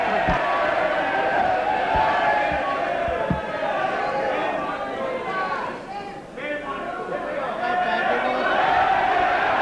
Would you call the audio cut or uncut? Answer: uncut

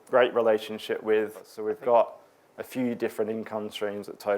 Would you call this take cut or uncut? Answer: cut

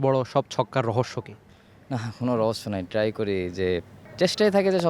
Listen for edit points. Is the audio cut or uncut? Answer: cut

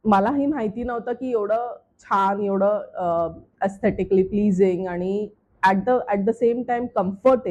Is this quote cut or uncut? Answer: uncut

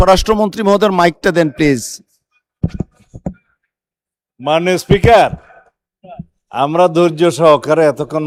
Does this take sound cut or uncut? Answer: uncut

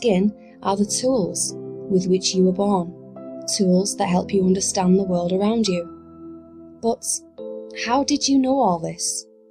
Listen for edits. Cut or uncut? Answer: cut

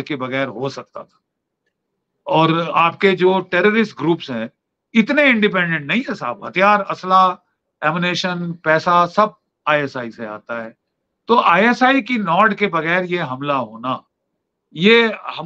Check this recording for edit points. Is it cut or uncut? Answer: uncut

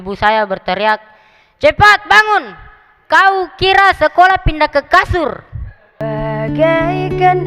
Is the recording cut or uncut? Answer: cut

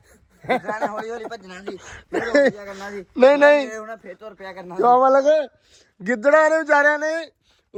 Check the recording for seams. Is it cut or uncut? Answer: uncut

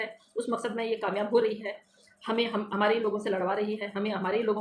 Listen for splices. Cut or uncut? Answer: uncut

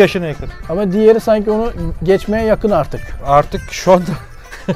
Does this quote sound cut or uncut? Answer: uncut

